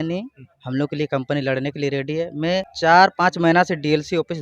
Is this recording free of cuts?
no; 1 cut; at 2.7 s

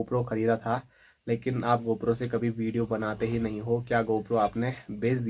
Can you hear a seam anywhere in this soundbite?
no; 0 cuts

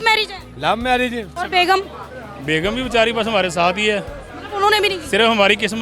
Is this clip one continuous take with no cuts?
no; 1 cut; at 1.3 s

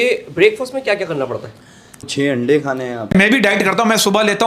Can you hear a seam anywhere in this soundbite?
yes; 2 cuts; at 2.1 s, 3.1 s

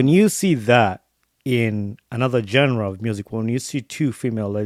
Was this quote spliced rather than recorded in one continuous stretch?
no; 0 cuts

